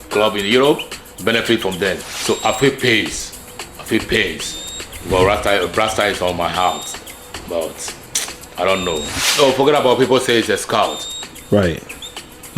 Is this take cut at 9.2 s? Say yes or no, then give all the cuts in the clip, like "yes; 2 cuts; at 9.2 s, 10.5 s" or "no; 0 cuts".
yes; 2 cuts; at 2.1 s, 9.2 s